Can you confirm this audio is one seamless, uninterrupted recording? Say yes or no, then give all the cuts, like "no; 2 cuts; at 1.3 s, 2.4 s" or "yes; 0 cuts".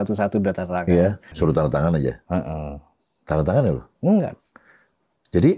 no; 1 cut; at 1.3 s